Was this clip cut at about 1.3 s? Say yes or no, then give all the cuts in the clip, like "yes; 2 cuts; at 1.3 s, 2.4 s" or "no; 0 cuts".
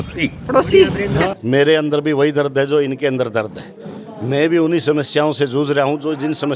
yes; 1 cut; at 1.3 s